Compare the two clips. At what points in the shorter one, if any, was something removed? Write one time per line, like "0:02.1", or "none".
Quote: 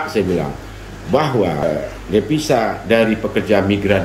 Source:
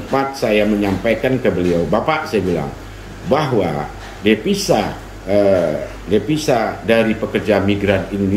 0:01.6